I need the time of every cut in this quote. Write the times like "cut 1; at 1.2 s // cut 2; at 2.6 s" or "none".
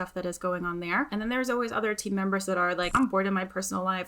cut 1; at 1.1 s // cut 2; at 2.9 s